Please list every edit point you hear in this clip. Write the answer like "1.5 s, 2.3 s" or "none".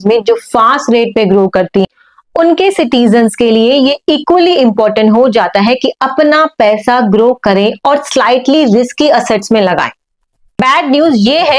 10.5 s